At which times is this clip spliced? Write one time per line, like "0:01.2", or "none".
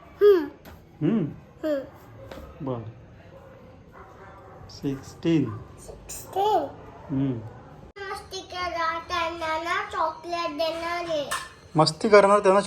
0:08.0